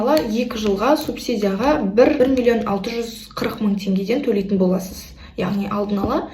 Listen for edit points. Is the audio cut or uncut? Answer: cut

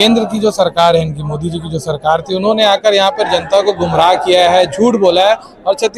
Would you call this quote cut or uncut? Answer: uncut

